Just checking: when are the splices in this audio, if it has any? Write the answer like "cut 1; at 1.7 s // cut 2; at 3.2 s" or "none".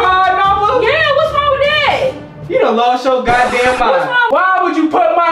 cut 1; at 4.2 s